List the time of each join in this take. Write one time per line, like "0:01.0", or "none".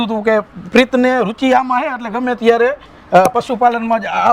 none